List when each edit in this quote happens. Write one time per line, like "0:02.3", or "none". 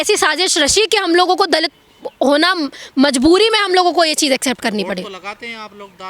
none